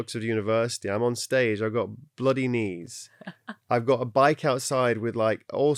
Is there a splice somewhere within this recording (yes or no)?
no